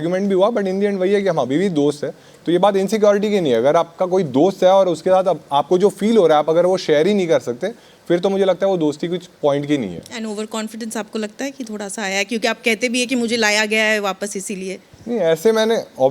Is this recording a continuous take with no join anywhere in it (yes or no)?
yes